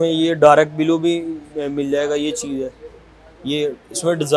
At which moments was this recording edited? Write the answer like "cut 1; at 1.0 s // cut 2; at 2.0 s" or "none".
none